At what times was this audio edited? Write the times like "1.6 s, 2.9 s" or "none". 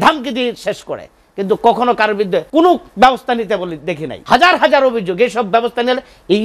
2.5 s, 4.1 s